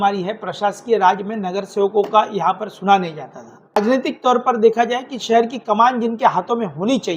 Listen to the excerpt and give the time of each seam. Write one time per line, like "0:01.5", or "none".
0:03.8